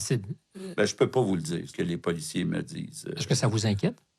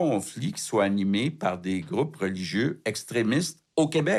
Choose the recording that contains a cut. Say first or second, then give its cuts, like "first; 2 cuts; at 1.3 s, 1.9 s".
first; 1 cut; at 1.7 s